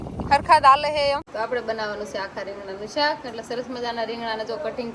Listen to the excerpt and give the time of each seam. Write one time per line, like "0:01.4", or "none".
0:01.3